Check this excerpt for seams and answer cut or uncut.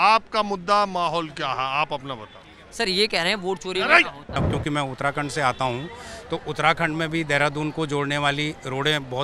cut